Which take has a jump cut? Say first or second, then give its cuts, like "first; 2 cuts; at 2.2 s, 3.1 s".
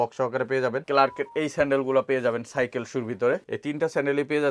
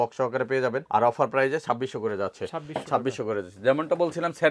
first; 2 cuts; at 0.8 s, 3.5 s